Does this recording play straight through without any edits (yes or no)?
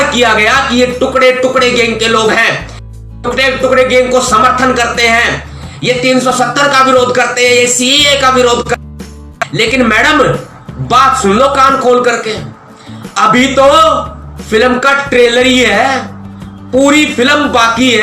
yes